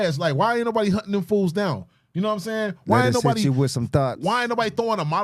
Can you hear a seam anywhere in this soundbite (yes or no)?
no